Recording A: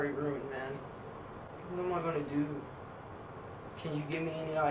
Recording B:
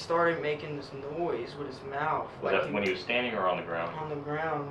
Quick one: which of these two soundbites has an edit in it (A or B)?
A